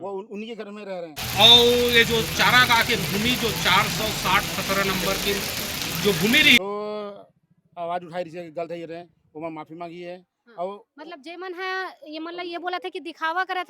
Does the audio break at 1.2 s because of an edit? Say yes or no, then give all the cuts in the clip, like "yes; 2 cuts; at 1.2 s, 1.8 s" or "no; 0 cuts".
yes; 2 cuts; at 1.2 s, 6.6 s